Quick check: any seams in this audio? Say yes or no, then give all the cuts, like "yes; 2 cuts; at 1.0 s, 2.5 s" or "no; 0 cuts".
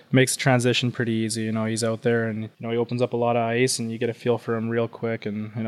yes; 1 cut; at 2.5 s